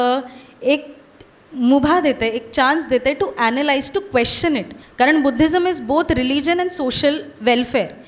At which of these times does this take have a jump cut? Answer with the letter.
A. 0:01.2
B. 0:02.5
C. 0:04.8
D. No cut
C